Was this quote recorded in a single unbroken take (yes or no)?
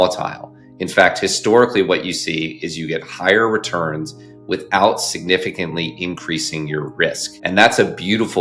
no